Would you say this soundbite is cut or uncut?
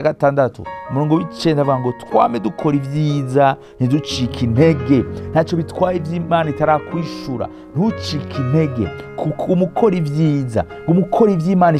uncut